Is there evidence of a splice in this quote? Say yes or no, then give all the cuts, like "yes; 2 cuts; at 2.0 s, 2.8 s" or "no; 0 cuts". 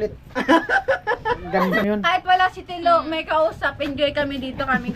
yes; 1 cut; at 1.8 s